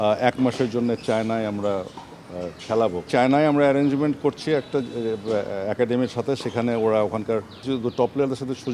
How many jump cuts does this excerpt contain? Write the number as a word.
two